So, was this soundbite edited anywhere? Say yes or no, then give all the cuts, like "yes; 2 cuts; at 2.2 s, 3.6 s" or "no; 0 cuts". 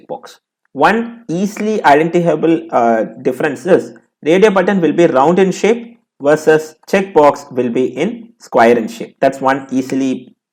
no; 0 cuts